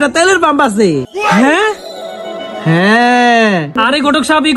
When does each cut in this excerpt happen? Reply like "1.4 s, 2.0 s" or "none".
none

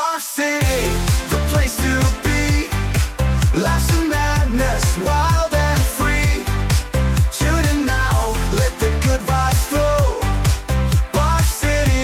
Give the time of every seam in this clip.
none

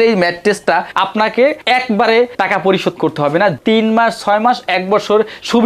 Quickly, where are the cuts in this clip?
0.9 s, 3.6 s

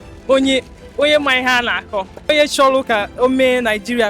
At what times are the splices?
2.2 s

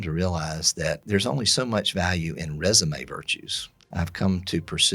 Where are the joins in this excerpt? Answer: 1.0 s, 3.9 s

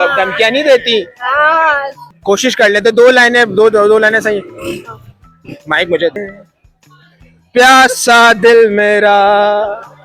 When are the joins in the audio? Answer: 2.1 s, 6.2 s

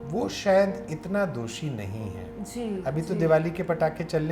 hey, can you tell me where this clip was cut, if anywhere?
none

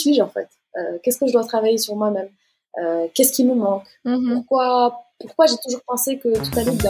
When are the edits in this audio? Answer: none

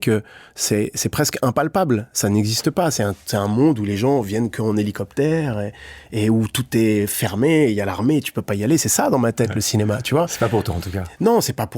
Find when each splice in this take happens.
none

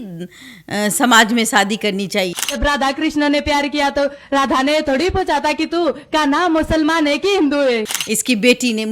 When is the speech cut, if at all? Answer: 7.9 s

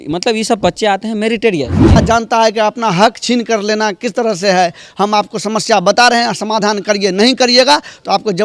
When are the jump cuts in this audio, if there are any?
2.0 s

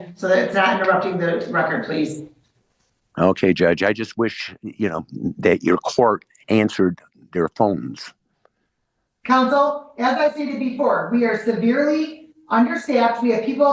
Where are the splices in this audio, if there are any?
none

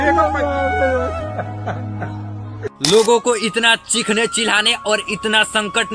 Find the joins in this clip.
2.8 s

